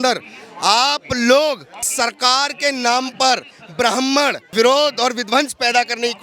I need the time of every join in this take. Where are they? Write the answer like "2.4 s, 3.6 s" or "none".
1.9 s, 4.5 s